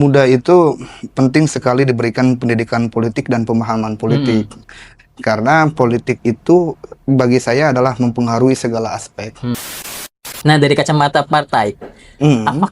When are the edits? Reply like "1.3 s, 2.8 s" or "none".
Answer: 10.2 s